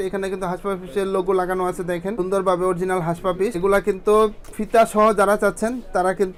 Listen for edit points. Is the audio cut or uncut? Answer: uncut